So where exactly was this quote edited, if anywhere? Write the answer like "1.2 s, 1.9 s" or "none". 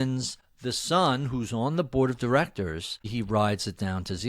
3.1 s